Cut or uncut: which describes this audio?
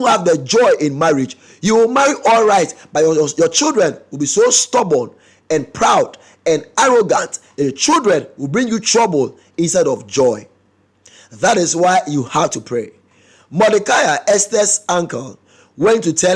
uncut